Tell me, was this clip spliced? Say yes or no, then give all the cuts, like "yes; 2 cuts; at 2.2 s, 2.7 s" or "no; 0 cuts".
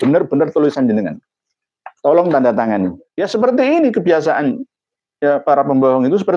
yes; 1 cut; at 3.0 s